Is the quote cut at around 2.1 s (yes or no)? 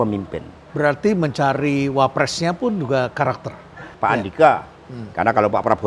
no